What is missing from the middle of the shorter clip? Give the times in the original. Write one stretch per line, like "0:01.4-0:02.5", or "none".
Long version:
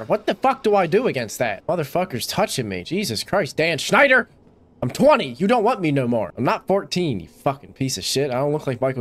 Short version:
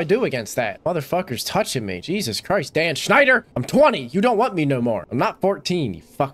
0:04.4-0:04.8